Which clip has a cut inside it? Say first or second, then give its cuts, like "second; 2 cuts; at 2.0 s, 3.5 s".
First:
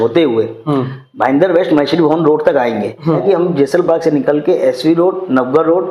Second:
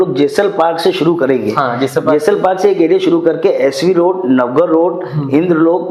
first; 1 cut; at 3.2 s